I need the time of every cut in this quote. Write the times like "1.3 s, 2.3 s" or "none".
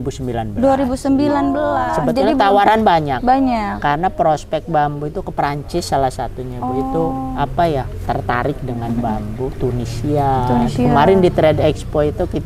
1.9 s